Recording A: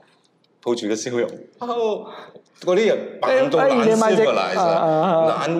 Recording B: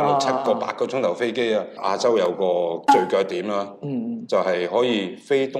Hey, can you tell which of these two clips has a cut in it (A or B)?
B